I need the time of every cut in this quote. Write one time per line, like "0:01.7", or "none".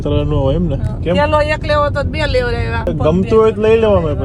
0:00.9
0:02.9

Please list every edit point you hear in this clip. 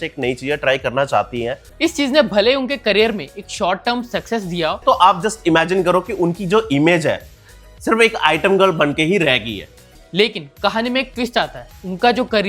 0:01.6
0:04.8
0:09.8

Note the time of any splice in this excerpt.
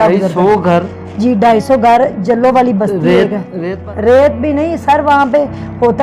0:03.7

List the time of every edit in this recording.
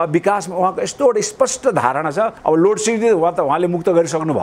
0:02.3

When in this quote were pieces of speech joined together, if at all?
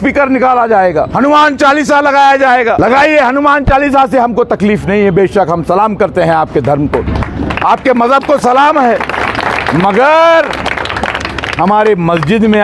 0:01.1
0:02.8

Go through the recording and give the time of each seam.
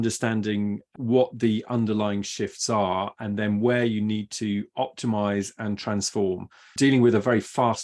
0:00.9
0:06.6

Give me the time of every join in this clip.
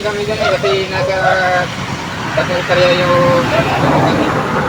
none

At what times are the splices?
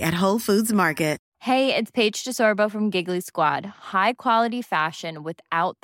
0:01.2

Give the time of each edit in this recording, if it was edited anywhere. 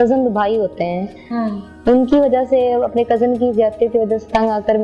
none

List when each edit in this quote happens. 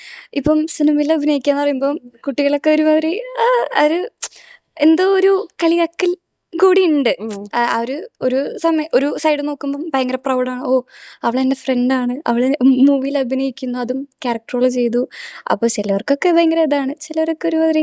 none

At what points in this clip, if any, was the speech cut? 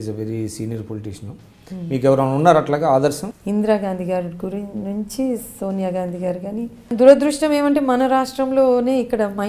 0:03.3
0:06.9

